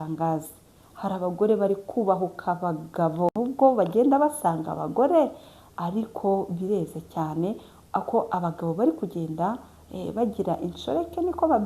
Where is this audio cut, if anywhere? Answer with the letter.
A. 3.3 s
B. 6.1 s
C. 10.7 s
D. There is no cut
A